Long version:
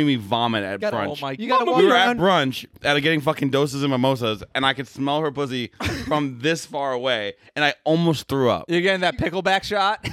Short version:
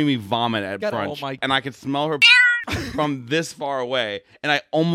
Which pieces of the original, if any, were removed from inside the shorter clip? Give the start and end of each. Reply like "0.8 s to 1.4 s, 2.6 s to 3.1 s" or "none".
1.3 s to 4.5 s